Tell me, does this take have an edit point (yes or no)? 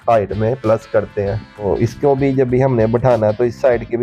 yes